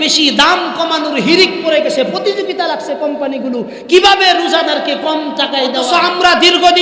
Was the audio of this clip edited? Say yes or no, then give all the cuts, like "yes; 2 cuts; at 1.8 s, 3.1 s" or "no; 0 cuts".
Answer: yes; 1 cut; at 5.8 s